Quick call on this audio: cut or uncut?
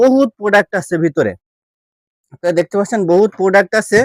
uncut